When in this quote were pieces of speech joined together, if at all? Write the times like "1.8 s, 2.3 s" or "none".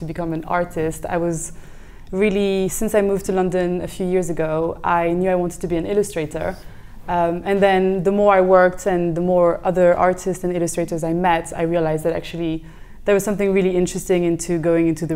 none